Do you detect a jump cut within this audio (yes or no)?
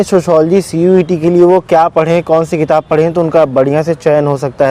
no